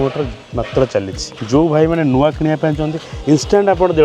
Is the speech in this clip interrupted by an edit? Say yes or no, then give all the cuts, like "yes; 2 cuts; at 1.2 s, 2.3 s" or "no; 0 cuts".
yes; 1 cut; at 1.2 s